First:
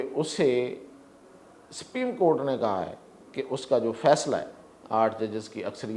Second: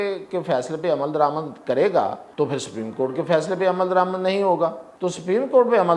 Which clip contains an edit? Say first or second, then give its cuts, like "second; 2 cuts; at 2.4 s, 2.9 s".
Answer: second; 2 cuts; at 2.2 s, 4.9 s